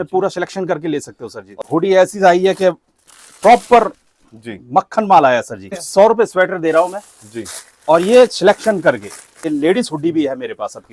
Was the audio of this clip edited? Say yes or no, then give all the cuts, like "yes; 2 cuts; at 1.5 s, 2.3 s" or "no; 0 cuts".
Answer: yes; 3 cuts; at 1.5 s, 5.8 s, 9.5 s